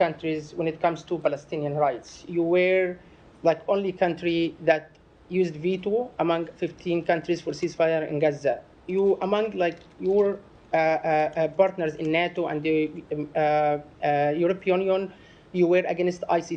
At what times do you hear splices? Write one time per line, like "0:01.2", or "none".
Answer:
none